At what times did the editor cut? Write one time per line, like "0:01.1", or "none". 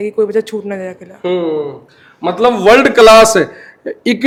none